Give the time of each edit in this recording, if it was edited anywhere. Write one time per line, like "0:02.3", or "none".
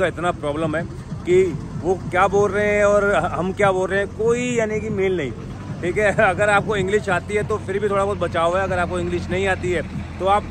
none